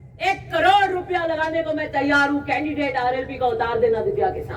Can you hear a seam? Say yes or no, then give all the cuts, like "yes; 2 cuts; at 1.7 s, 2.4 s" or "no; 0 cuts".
no; 0 cuts